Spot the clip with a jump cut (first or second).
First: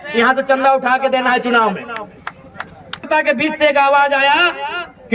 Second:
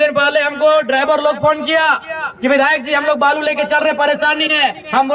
first